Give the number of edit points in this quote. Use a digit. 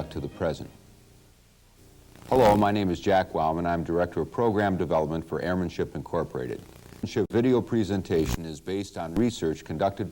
1